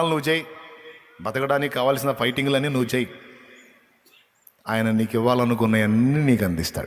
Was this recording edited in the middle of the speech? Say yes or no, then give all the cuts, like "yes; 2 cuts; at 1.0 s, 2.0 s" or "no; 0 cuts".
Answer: no; 0 cuts